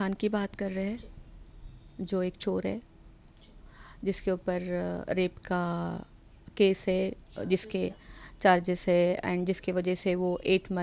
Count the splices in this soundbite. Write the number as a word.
zero